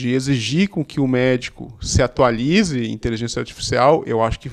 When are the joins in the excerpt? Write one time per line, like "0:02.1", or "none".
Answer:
none